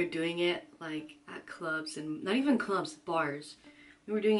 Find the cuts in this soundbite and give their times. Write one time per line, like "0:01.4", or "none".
none